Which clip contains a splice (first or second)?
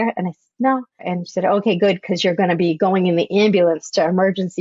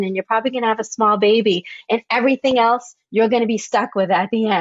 first